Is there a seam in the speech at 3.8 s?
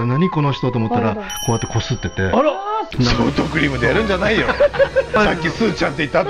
no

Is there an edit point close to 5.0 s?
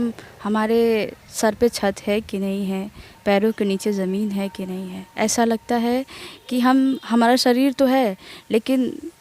yes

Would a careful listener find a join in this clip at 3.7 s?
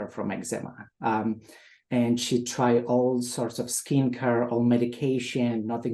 no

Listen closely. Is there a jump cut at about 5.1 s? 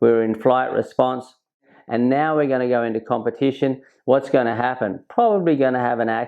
no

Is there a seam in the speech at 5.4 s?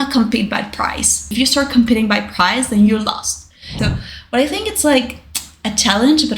no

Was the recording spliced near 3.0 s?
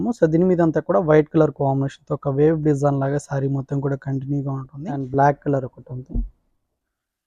no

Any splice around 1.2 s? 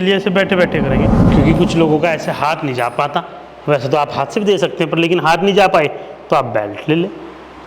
yes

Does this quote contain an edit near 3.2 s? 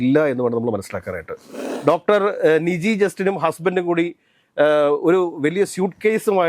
no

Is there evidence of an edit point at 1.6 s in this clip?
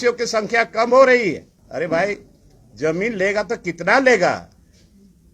yes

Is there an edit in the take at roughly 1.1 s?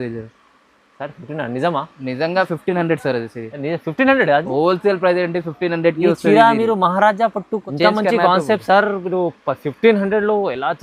no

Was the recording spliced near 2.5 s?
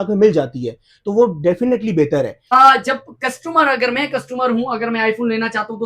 yes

